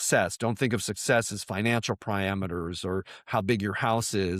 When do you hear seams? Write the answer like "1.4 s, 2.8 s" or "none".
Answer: none